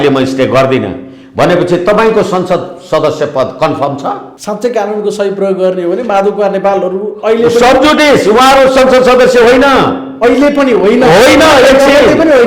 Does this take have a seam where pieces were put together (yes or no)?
yes